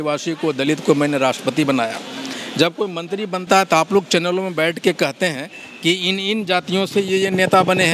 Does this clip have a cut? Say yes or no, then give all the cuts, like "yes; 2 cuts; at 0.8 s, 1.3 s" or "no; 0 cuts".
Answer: no; 0 cuts